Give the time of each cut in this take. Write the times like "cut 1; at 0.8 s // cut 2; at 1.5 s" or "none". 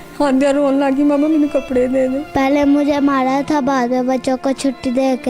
cut 1; at 2.2 s